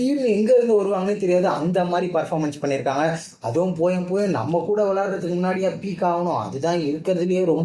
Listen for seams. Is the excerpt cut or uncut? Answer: uncut